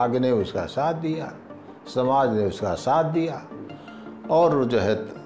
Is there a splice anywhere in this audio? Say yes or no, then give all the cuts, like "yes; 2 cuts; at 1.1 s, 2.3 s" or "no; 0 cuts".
no; 0 cuts